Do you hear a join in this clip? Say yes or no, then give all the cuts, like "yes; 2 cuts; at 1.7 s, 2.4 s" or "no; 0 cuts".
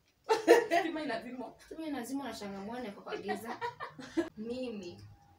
yes; 1 cut; at 4.3 s